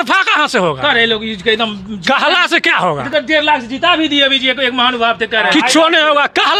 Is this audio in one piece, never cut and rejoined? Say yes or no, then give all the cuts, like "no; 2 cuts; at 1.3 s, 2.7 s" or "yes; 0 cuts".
yes; 0 cuts